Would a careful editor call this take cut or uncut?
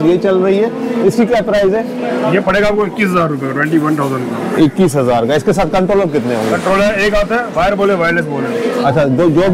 uncut